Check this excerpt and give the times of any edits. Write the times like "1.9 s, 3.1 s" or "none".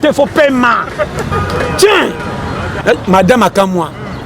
2.7 s